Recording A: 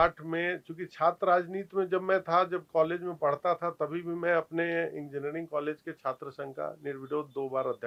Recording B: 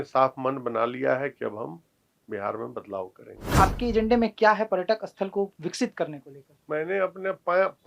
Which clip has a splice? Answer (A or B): B